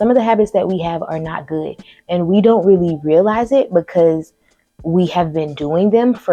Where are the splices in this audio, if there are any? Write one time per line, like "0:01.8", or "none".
none